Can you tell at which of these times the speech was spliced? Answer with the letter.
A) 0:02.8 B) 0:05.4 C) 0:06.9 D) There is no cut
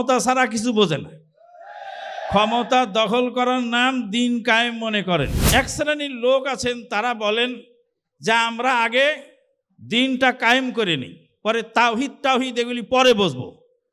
B